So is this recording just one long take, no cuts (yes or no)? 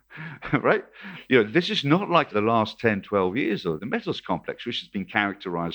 no